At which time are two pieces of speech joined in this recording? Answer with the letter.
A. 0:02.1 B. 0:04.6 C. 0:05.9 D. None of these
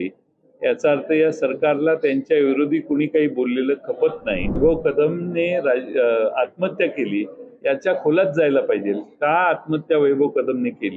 B